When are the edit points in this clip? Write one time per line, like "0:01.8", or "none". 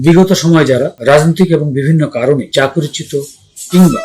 0:01.0
0:02.5